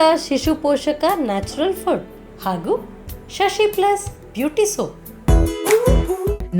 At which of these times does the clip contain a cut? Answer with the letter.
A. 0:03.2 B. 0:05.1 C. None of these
B